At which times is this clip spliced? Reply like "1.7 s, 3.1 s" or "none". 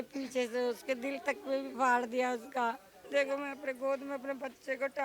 3.0 s